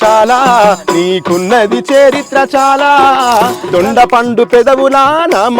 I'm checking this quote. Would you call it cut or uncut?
cut